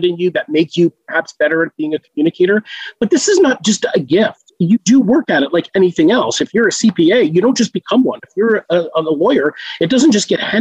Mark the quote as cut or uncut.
uncut